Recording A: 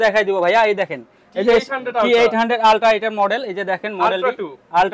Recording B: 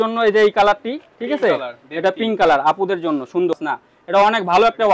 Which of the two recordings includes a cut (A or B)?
B